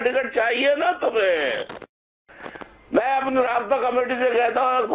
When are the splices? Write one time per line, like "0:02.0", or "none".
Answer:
none